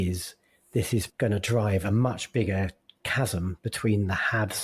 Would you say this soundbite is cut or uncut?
cut